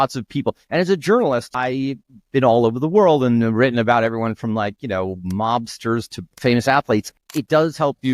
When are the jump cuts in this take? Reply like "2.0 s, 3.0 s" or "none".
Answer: 1.5 s, 7.1 s